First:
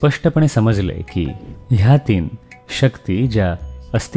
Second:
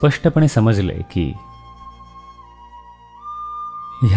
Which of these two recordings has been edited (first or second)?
first